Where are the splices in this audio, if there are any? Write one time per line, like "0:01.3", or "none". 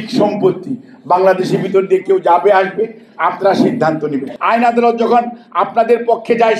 0:04.3